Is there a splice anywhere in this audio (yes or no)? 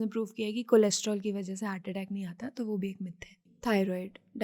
yes